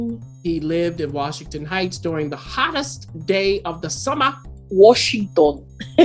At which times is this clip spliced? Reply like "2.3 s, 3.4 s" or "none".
4.5 s